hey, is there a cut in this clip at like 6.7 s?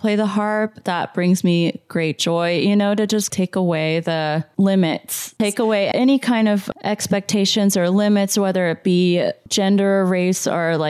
no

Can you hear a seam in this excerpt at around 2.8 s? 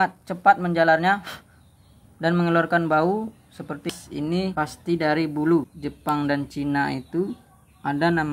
no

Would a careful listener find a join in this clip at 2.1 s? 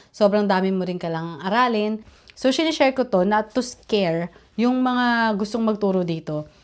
yes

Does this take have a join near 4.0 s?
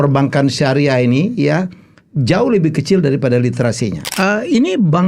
yes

